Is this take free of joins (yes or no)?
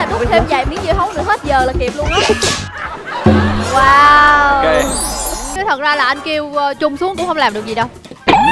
no